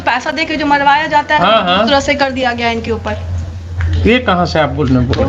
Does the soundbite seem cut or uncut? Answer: uncut